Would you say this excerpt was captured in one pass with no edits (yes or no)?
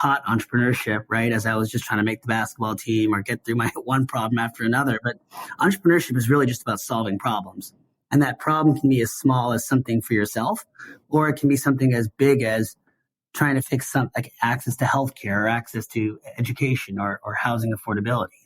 no